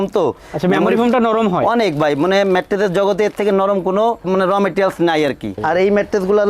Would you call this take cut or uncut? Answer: cut